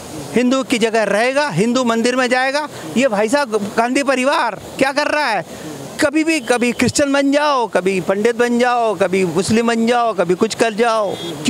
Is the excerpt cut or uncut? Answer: uncut